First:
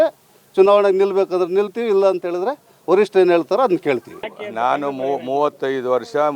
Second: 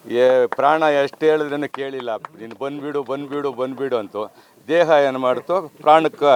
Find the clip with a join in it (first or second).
first